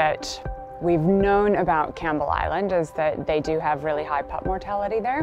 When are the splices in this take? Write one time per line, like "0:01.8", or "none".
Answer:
none